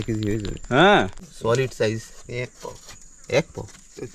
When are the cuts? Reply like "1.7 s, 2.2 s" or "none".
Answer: 1.2 s